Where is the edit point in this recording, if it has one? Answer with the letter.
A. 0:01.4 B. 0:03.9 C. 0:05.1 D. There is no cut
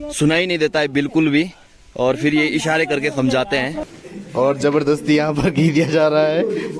B